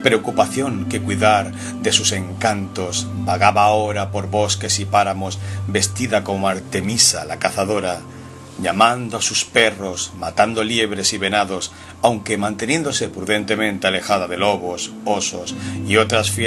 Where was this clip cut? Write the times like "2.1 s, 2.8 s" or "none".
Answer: none